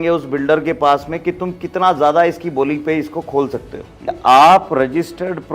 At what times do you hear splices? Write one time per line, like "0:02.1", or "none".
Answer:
0:04.1